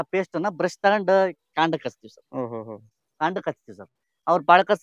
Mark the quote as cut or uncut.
uncut